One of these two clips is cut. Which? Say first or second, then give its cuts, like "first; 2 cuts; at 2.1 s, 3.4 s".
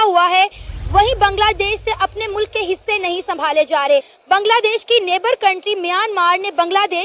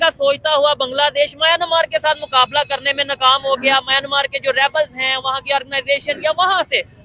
first; 1 cut; at 4.1 s